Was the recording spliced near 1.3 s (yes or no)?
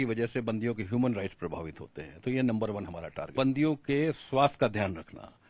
no